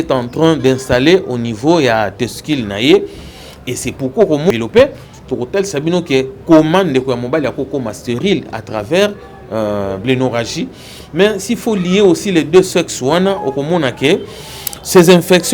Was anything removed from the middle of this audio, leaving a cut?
yes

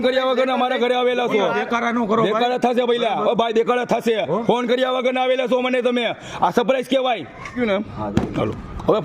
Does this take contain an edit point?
yes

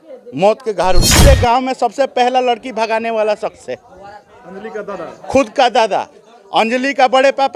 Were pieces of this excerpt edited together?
yes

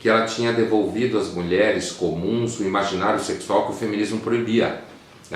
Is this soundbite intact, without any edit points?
no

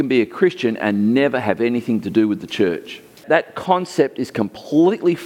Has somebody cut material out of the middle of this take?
yes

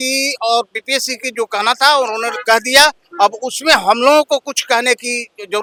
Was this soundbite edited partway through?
no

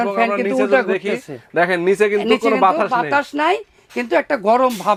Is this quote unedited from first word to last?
yes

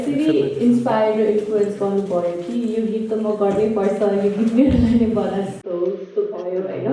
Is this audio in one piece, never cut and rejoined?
yes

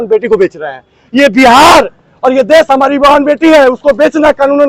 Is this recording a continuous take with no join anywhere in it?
yes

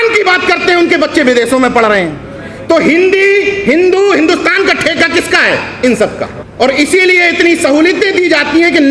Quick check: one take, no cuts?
no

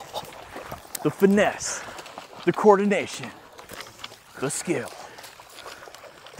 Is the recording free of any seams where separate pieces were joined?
yes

